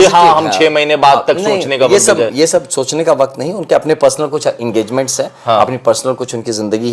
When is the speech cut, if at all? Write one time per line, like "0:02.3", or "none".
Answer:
none